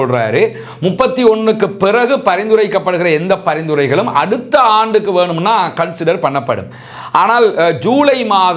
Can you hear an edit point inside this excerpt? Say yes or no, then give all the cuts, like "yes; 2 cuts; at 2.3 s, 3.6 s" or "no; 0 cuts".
no; 0 cuts